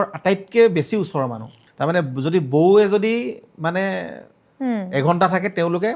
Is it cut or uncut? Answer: uncut